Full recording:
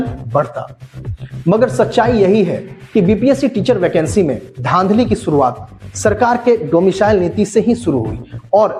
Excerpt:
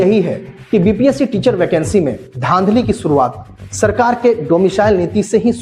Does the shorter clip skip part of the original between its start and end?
no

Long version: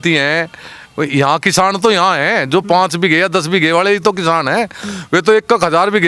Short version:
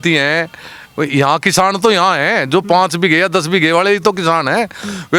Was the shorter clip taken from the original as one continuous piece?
yes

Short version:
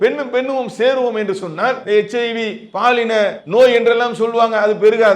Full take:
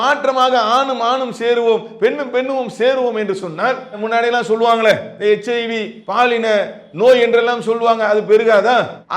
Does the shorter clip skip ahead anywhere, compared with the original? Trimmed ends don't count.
yes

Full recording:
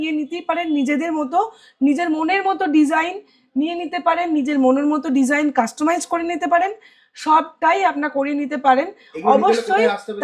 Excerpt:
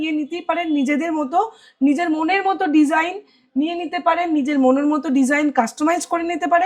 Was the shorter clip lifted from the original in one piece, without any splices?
yes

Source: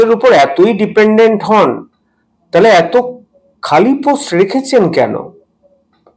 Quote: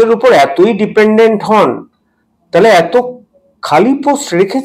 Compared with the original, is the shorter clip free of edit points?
yes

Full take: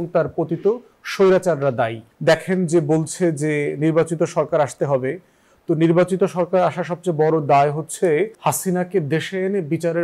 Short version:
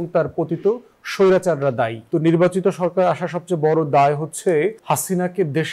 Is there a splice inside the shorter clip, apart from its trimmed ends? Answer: yes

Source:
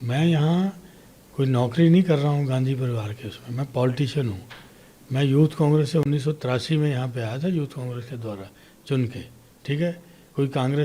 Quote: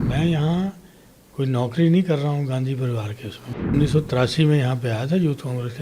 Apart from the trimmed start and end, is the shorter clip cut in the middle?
yes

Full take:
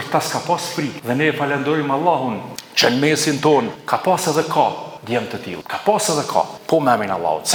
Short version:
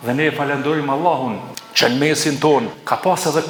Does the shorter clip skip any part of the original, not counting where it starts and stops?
no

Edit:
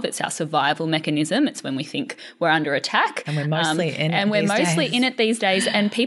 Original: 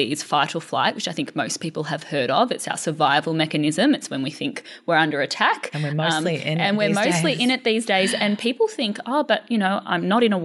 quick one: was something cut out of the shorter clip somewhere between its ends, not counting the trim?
no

